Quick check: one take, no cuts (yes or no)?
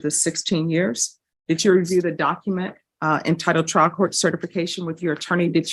yes